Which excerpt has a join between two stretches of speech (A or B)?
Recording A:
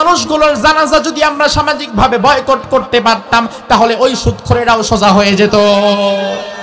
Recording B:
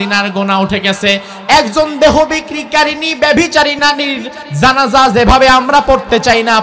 B